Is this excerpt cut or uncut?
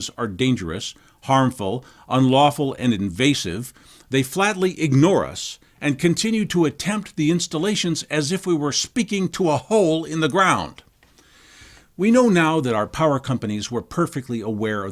cut